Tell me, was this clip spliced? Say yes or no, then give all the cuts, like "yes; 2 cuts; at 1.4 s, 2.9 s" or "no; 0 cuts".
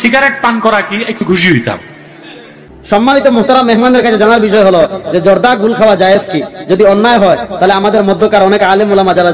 yes; 1 cut; at 3.0 s